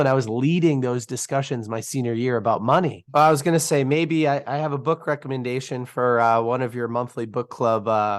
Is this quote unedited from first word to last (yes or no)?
no